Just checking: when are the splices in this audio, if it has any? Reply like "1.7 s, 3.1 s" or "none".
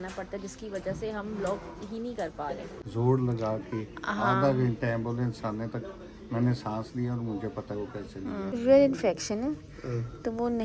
2.7 s, 8.6 s